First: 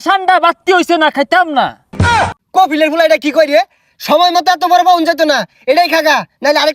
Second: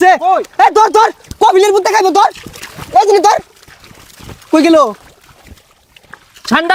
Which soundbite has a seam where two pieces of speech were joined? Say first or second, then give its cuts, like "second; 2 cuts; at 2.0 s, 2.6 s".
first; 1 cut; at 2.0 s